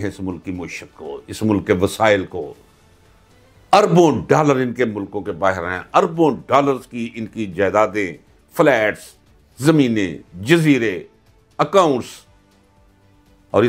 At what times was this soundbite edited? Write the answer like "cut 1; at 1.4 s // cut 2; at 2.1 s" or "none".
none